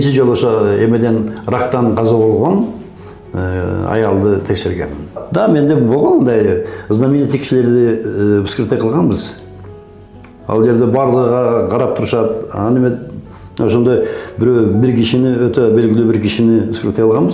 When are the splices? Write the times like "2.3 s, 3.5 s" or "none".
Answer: 5.2 s